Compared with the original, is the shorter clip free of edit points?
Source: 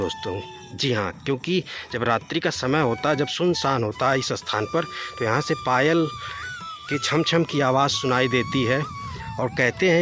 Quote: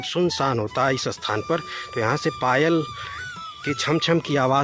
yes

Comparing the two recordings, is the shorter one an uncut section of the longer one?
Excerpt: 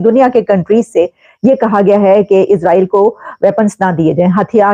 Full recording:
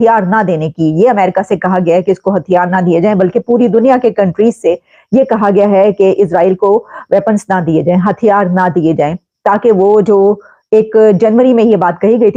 yes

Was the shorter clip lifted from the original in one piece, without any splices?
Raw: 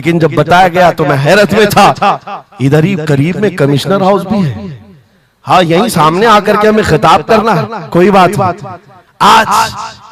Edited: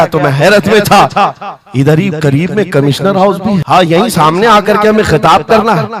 no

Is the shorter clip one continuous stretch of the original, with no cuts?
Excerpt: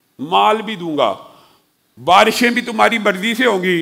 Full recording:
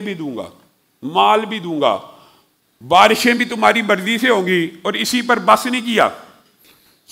yes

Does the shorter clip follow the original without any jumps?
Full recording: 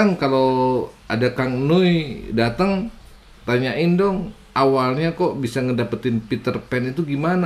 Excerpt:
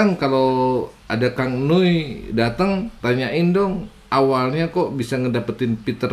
no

